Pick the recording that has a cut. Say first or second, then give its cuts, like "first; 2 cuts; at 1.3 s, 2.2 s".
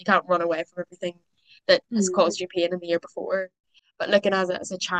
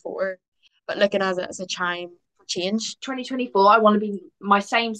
second; 1 cut; at 2.9 s